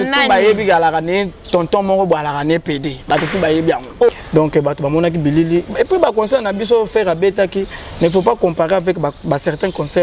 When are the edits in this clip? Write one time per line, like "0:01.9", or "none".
0:04.1